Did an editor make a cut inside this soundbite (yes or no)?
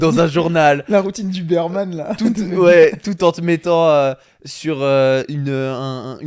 no